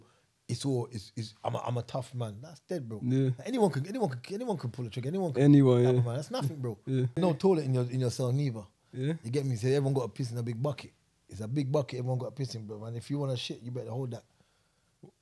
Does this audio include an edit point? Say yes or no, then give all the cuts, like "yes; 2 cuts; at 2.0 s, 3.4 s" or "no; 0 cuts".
yes; 1 cut; at 7.2 s